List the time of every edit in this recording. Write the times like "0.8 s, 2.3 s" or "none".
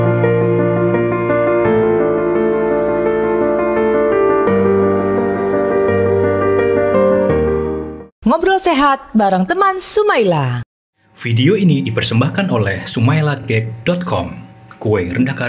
none